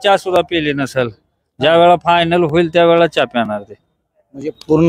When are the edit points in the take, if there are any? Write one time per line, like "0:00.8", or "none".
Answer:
none